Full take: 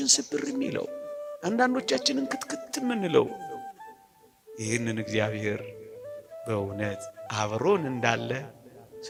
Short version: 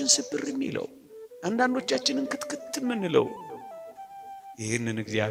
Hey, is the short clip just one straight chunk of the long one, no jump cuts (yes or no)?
yes